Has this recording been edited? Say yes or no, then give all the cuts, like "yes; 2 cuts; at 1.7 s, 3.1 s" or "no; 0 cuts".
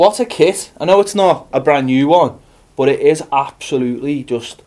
yes; 1 cut; at 2.7 s